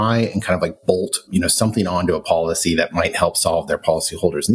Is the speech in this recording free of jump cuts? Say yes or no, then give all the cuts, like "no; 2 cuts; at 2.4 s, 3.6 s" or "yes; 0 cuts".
no; 1 cut; at 1.3 s